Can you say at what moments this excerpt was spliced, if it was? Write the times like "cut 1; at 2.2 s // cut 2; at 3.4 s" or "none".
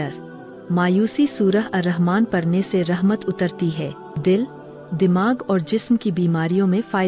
cut 1; at 4.0 s